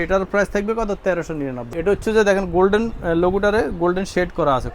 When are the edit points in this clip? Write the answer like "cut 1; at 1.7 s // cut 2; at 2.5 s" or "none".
cut 1; at 1.7 s